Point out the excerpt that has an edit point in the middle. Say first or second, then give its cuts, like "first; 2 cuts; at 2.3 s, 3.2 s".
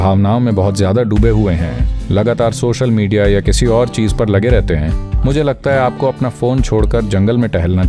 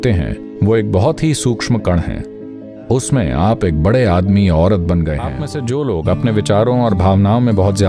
second; 1 cut; at 5.5 s